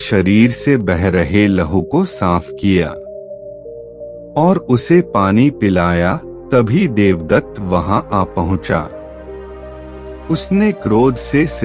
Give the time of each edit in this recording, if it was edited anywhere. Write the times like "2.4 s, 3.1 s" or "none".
2.9 s, 4.3 s